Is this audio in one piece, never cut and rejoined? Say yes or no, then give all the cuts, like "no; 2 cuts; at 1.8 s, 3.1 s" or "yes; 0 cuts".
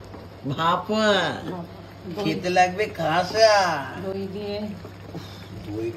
yes; 0 cuts